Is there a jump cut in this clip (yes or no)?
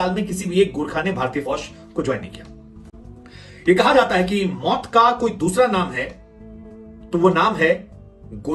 no